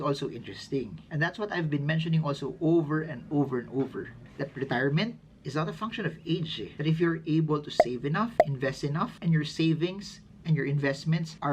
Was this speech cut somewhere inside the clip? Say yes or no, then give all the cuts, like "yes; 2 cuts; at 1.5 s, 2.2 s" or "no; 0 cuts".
no; 0 cuts